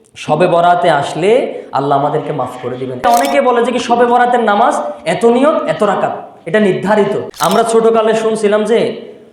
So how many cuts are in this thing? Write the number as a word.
two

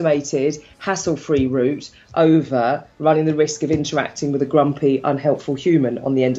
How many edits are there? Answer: zero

